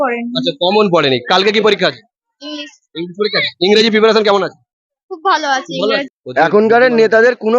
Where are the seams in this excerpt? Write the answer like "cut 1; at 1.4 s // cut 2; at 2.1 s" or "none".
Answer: cut 1; at 6.2 s